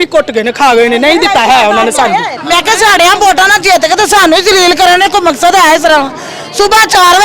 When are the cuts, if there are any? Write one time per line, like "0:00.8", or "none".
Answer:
0:02.3